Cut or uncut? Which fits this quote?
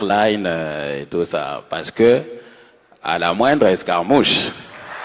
uncut